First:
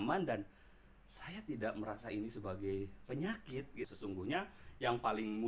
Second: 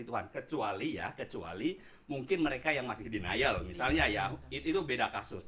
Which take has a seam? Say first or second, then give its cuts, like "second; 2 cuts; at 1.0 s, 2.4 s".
first; 1 cut; at 3.9 s